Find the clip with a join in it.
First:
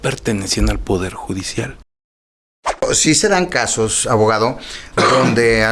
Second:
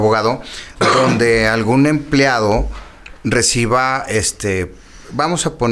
first; 1 cut; at 2.3 s

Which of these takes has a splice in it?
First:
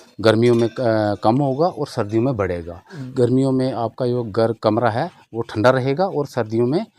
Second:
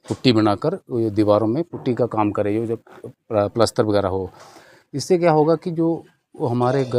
first; 1 cut; at 3.0 s

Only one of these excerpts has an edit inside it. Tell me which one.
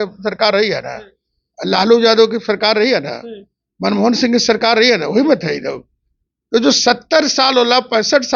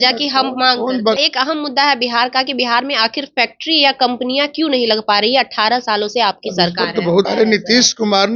second; 2 cuts; at 1.2 s, 7.3 s

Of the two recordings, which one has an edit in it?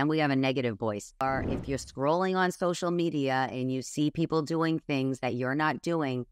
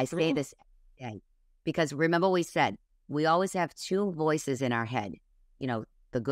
first; 1 cut; at 1.2 s

